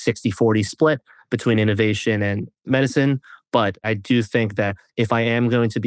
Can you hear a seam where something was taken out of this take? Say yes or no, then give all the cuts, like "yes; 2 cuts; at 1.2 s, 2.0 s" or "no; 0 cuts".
yes; 1 cut; at 3.8 s